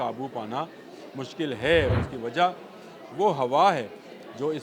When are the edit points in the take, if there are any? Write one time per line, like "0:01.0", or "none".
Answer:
0:01.9